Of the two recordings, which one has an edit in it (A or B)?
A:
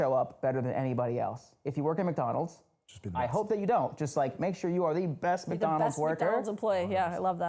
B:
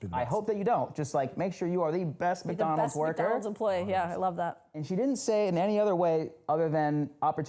A